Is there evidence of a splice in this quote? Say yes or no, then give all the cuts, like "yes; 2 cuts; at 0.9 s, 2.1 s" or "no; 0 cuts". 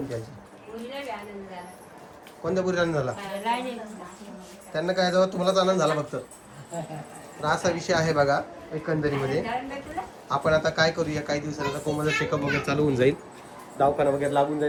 no; 0 cuts